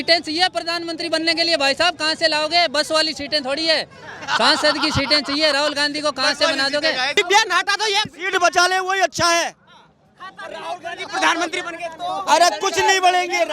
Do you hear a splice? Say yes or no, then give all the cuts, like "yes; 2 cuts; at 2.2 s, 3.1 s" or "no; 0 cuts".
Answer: yes; 1 cut; at 7.2 s